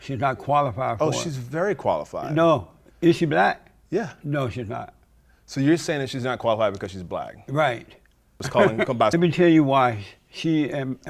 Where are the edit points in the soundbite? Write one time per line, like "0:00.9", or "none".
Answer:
0:08.4
0:09.1

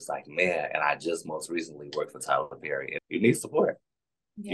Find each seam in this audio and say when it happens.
0:03.0

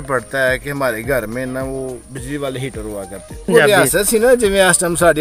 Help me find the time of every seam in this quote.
0:03.3

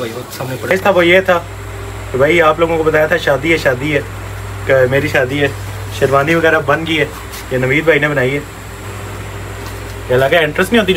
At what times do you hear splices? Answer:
0:00.7
0:08.8

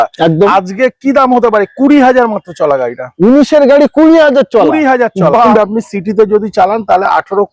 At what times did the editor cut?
0:05.5

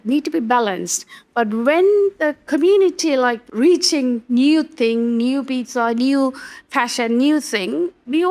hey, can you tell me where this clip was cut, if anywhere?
0:03.5

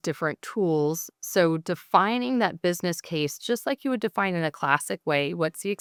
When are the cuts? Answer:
none

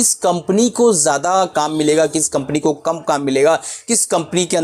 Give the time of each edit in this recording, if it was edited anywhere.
none

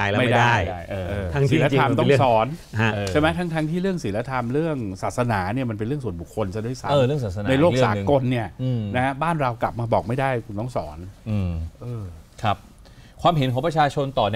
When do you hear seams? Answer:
none

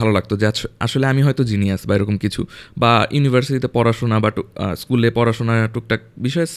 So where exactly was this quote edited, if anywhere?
none

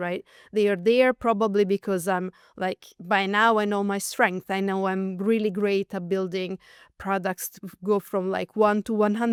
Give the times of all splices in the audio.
none

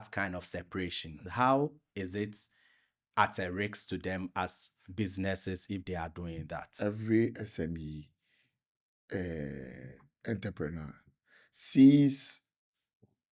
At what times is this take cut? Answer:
0:01.2
0:06.6

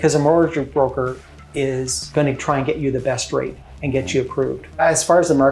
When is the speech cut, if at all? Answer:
0:02.1
0:04.8

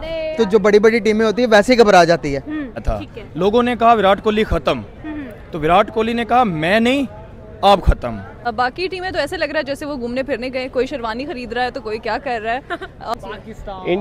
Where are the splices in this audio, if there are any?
0:02.8
0:08.5
0:13.1

